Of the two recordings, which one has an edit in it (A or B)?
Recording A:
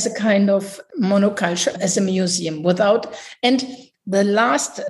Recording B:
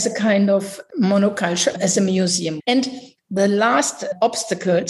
B